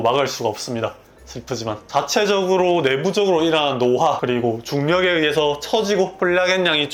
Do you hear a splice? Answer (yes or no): no